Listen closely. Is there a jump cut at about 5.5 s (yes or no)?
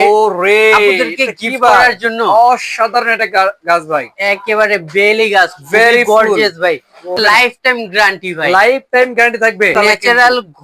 no